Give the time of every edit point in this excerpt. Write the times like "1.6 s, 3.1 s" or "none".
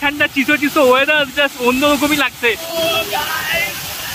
2.7 s

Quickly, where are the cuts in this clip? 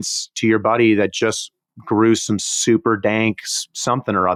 none

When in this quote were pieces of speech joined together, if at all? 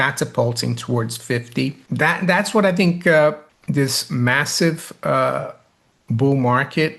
1.8 s, 3.5 s

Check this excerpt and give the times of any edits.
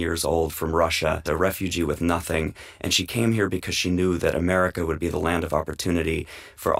1.2 s

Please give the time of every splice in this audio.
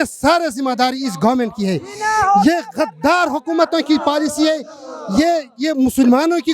none

